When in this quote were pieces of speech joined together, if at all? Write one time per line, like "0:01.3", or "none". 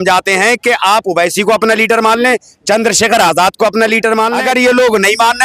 0:04.4